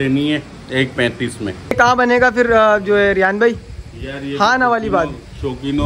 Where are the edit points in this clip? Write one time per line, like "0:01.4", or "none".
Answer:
0:01.8